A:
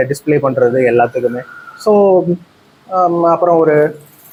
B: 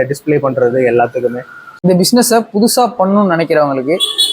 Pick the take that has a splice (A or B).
B